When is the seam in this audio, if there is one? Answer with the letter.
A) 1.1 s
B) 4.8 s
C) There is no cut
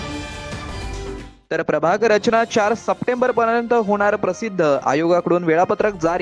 A